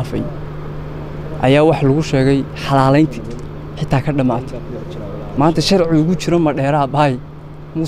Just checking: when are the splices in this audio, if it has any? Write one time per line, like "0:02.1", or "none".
none